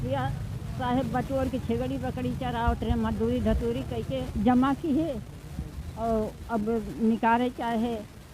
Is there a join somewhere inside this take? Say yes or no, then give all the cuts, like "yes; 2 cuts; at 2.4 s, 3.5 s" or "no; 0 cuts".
yes; 1 cut; at 4.3 s